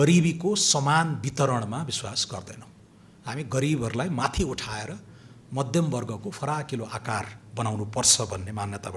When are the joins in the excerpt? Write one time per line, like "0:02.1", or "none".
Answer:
none